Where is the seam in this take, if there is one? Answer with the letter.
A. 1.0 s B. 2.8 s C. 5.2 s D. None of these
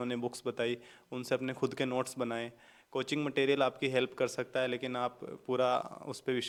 D